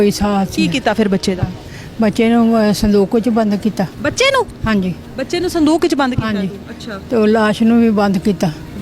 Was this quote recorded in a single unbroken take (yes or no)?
yes